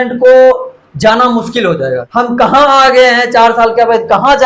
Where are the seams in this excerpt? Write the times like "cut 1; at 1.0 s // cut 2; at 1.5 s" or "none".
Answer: cut 1; at 2.0 s